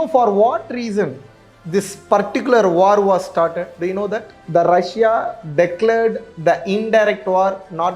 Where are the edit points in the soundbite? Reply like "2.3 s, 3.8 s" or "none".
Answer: 4.4 s